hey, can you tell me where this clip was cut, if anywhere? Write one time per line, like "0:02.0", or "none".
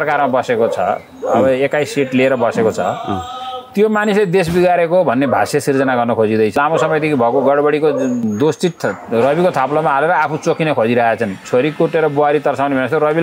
0:06.5
0:08.2
0:11.4

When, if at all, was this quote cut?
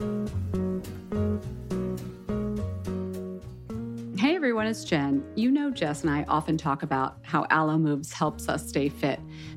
none

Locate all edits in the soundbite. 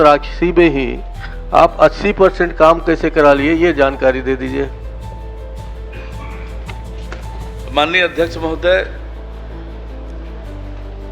none

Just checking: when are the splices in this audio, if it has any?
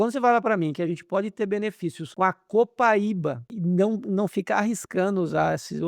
0:02.0
0:03.5

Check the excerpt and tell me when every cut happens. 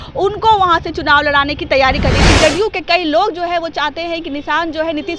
0:02.2

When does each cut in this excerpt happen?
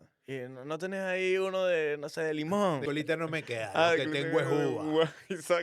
0:02.8

